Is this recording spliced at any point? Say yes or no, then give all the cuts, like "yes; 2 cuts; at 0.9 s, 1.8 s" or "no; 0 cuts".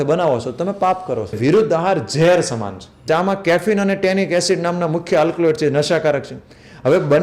yes; 2 cuts; at 1.4 s, 3.1 s